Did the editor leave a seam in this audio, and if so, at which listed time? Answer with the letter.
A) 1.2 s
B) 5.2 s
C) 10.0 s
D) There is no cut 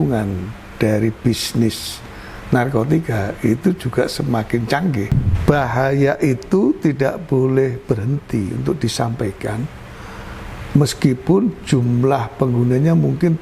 B